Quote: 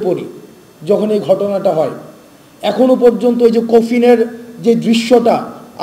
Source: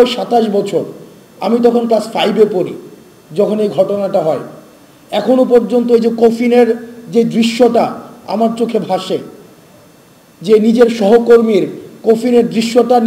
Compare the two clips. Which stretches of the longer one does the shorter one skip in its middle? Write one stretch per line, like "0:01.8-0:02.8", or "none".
none